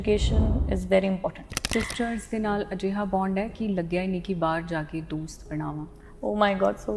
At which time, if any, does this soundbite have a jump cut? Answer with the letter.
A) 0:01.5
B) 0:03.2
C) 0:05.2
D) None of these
A